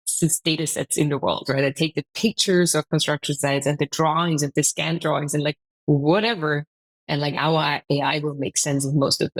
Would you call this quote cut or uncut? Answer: uncut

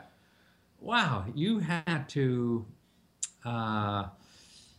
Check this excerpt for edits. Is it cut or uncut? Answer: uncut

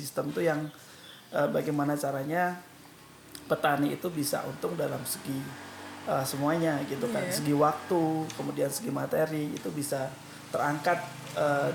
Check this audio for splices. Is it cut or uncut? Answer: uncut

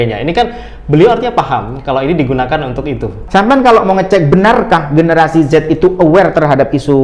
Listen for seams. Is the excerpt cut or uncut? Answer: cut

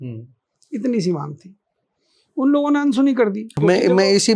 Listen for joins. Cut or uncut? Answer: uncut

